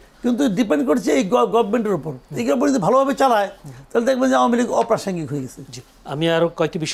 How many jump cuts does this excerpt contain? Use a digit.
0